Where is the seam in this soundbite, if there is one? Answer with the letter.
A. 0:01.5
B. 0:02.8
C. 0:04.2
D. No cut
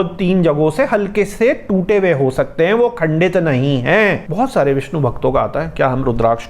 C